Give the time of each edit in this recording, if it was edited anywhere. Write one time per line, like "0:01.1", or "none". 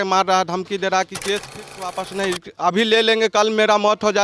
0:01.6